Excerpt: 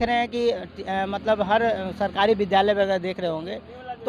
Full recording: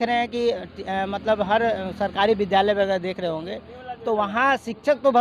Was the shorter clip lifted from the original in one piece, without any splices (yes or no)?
yes